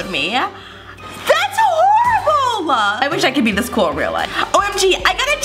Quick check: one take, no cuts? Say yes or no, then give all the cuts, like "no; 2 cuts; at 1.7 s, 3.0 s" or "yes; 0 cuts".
no; 2 cuts; at 3.0 s, 4.3 s